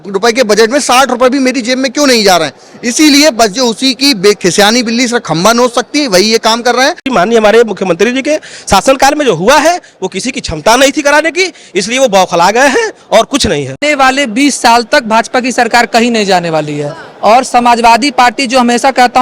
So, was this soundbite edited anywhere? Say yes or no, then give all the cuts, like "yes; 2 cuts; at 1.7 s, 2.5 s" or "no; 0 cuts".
yes; 2 cuts; at 7.0 s, 13.8 s